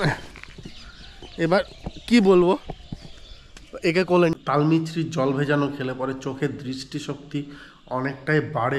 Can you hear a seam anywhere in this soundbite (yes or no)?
yes